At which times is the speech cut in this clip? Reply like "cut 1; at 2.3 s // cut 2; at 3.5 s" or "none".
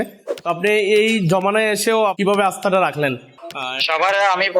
cut 1; at 2.2 s // cut 2; at 3.4 s